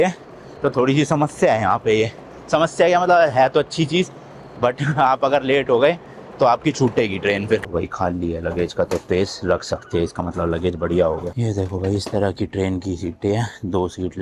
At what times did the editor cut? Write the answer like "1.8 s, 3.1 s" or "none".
none